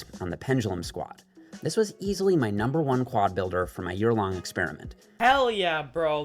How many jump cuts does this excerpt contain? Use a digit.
1